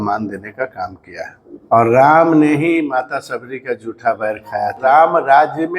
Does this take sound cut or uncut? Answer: cut